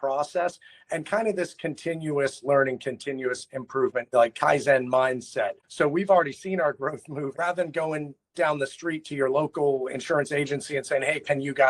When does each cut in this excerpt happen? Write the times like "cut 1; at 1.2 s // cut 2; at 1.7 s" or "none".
cut 1; at 4.1 s // cut 2; at 5.6 s // cut 3; at 7.4 s